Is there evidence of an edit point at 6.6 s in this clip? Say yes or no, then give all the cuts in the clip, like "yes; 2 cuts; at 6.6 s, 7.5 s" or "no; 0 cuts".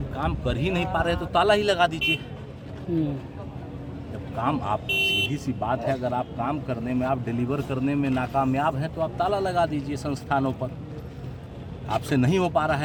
no; 0 cuts